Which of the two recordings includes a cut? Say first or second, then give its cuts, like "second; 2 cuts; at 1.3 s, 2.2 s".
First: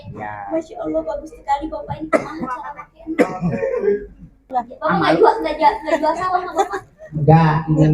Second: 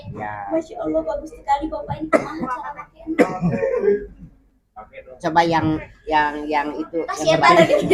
first; 1 cut; at 4.5 s